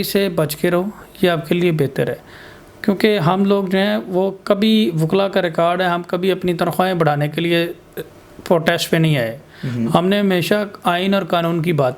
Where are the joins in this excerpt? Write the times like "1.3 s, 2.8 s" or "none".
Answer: none

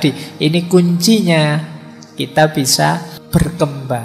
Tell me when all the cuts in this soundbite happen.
3.2 s

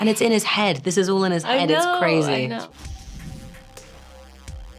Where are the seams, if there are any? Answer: 2.7 s

